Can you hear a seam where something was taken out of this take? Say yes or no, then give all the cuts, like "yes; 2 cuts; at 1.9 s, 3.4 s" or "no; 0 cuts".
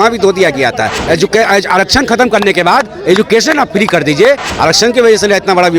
yes; 2 cuts; at 1.0 s, 4.5 s